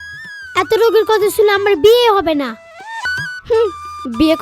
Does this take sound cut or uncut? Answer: cut